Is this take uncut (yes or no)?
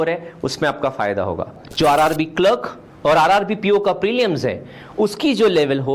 no